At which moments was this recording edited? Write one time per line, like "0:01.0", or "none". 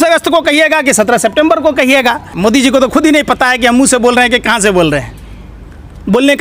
0:02.3